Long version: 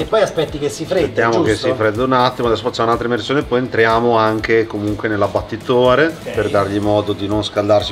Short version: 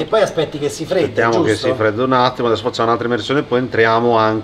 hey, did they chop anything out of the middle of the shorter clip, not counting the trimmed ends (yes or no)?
no